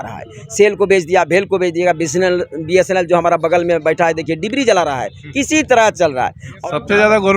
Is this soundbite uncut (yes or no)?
no